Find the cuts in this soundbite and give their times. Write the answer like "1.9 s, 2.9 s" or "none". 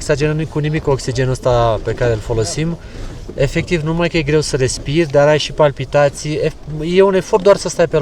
none